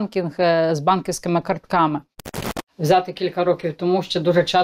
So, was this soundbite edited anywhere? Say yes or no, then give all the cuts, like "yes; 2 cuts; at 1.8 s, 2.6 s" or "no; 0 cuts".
yes; 1 cut; at 2.2 s